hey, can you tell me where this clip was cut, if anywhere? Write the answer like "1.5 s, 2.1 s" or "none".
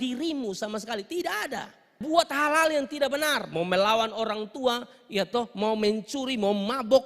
2.0 s